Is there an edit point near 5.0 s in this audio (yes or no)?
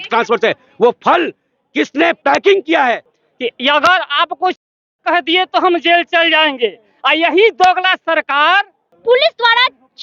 no